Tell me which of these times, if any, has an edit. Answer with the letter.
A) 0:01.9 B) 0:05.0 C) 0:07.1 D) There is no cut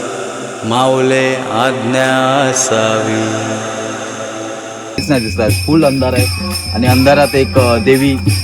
B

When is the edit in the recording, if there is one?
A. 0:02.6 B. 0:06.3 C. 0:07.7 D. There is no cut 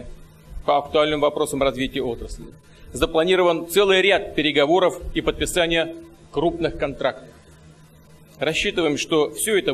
D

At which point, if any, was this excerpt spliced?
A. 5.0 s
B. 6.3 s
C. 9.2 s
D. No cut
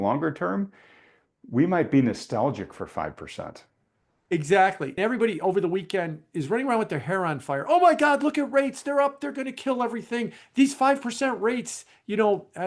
A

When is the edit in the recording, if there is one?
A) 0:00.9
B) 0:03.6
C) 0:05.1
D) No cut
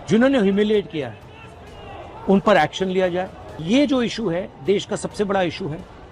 B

